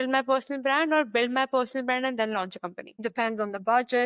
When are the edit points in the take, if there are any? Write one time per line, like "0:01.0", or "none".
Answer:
0:03.0